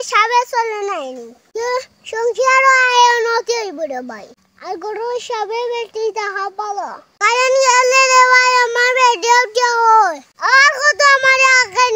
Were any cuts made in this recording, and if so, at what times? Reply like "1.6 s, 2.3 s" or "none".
7.1 s